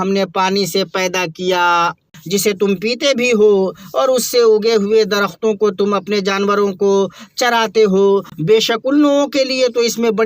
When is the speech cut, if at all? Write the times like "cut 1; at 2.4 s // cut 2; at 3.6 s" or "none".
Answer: cut 1; at 2.1 s // cut 2; at 8.3 s